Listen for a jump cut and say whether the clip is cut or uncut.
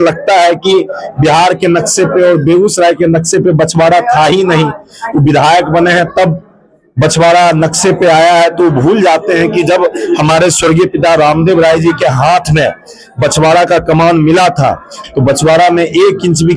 uncut